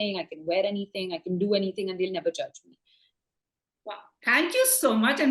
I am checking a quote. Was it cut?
no; 0 cuts

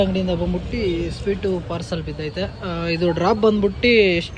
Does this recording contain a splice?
no; 0 cuts

